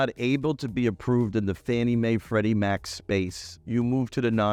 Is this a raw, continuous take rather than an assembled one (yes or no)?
yes